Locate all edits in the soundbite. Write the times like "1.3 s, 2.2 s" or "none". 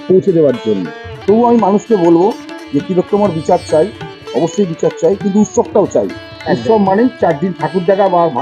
1.1 s